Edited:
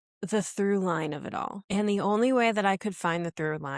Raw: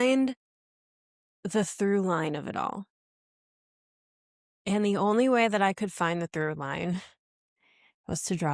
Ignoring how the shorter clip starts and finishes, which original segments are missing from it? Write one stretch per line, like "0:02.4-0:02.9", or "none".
0:02.8-0:04.5